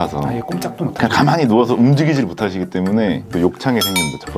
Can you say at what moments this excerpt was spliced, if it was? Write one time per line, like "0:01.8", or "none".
0:03.3